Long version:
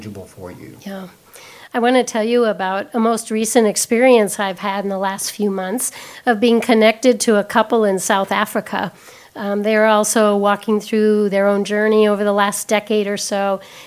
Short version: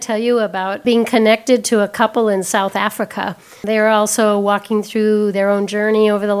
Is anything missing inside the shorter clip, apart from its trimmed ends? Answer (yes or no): yes